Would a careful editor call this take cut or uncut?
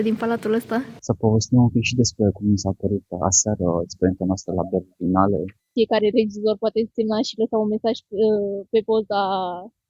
cut